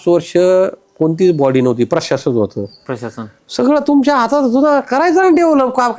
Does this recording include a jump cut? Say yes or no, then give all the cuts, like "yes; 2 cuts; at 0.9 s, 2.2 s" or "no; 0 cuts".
no; 0 cuts